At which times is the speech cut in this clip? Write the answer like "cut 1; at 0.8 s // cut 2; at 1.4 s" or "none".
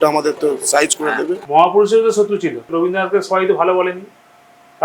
cut 1; at 1.4 s // cut 2; at 2.6 s